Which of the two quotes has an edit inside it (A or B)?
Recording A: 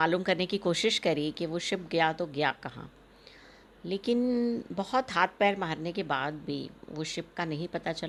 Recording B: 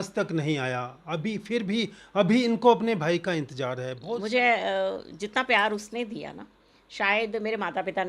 B